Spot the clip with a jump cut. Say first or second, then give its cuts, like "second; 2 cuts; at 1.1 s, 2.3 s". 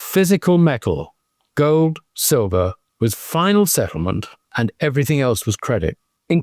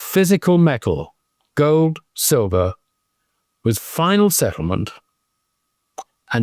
first; 2 cuts; at 2.8 s, 4.4 s